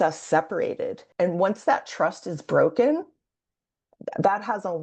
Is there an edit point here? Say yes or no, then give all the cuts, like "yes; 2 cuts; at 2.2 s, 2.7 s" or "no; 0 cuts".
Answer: yes; 1 cut; at 1.0 s